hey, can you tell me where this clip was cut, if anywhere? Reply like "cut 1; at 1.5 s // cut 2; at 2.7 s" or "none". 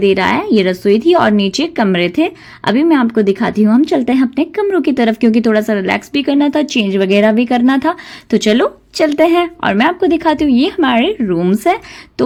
none

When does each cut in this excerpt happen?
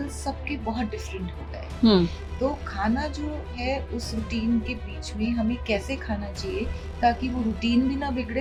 none

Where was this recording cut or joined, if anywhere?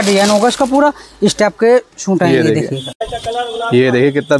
cut 1; at 3.1 s

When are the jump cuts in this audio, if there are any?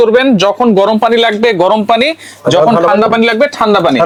none

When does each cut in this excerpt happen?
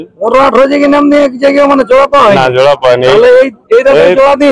none

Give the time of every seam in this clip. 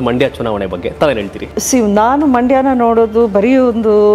cut 1; at 1.5 s

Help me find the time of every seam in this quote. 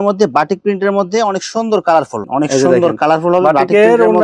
cut 1; at 2.2 s

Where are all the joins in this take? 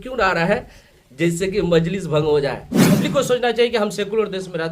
cut 1; at 3.0 s

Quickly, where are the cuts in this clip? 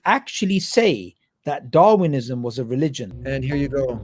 cut 1; at 3.1 s

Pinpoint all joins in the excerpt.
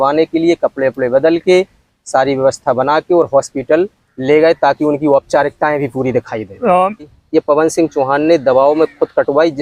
cut 1; at 7.2 s

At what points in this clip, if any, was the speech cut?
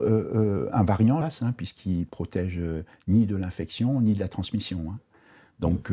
cut 1; at 1.2 s

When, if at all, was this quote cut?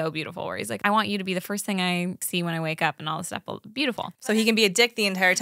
cut 1; at 0.8 s // cut 2; at 2.2 s // cut 3; at 4.3 s

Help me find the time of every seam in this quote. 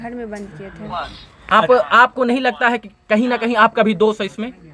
none

